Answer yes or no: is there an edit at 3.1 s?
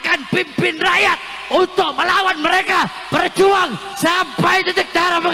no